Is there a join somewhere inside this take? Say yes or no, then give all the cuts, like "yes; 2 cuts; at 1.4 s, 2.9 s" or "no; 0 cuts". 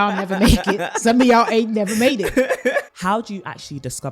yes; 1 cut; at 2.9 s